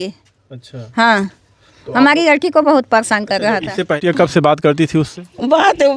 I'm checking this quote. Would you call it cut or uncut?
cut